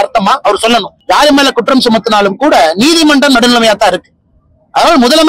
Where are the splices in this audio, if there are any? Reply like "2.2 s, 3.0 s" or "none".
0.9 s